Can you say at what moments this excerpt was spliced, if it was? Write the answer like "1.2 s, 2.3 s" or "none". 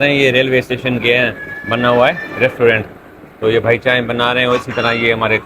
none